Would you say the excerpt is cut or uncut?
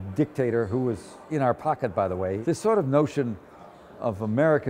cut